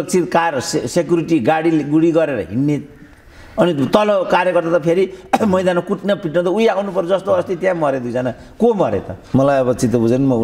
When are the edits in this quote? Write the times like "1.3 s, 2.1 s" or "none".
9.2 s